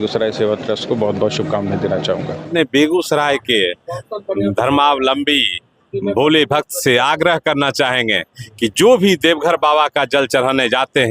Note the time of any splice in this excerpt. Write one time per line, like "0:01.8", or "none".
0:02.5